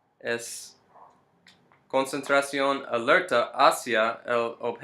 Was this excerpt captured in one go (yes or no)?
no